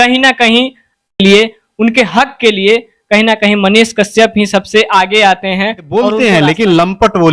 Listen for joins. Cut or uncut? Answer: cut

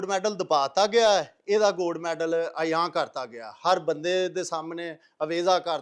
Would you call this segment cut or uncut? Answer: uncut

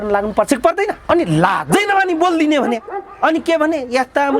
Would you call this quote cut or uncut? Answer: cut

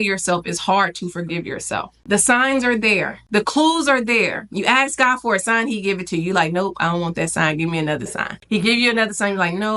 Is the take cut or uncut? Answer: cut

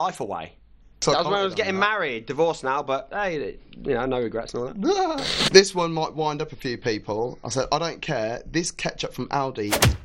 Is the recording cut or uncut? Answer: cut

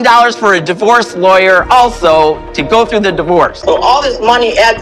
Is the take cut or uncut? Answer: cut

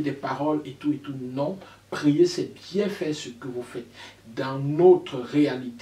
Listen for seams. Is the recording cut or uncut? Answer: cut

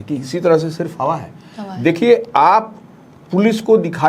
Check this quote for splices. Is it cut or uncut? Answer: uncut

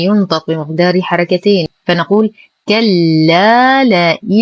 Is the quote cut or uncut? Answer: cut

